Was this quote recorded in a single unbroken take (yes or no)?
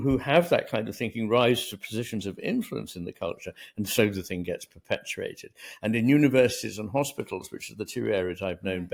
yes